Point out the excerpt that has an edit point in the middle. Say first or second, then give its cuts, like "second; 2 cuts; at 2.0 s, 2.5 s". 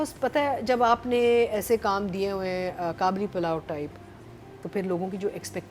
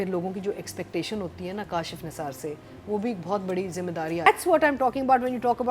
second; 1 cut; at 4.3 s